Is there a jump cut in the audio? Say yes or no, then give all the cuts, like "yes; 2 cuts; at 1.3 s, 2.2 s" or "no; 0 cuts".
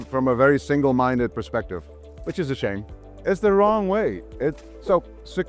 yes; 1 cut; at 3.0 s